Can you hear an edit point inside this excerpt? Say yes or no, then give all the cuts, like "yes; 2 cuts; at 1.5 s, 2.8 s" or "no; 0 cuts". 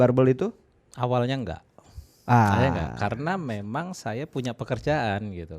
no; 0 cuts